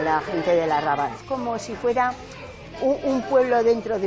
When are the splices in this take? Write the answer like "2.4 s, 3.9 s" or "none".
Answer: 1.2 s